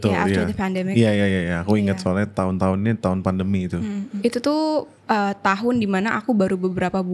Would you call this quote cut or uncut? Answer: cut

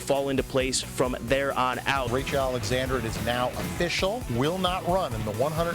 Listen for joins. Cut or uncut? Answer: cut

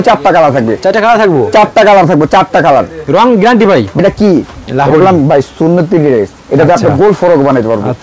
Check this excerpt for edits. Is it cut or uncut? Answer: cut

